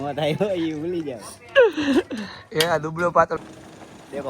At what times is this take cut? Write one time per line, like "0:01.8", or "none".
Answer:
0:03.4